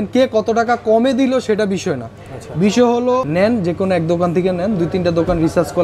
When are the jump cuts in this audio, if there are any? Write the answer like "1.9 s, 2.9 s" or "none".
none